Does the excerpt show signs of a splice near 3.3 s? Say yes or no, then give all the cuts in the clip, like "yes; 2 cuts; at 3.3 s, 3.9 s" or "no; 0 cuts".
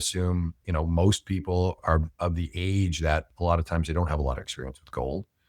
no; 1 cut; at 1.8 s